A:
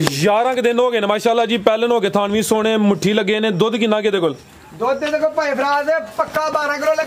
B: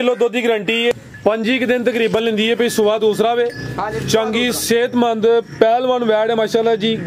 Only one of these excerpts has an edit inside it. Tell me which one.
B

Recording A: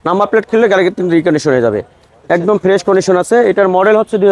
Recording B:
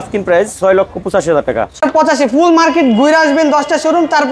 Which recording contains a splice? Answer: B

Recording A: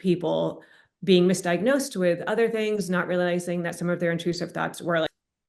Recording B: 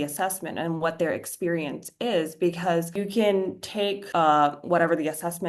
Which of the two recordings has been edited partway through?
B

